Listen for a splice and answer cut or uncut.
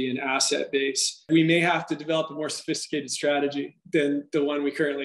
cut